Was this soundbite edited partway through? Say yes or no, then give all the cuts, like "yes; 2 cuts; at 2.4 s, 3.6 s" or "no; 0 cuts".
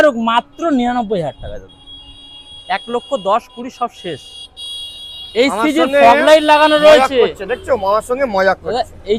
no; 0 cuts